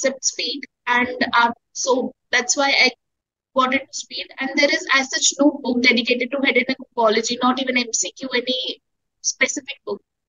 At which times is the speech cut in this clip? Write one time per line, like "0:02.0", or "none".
none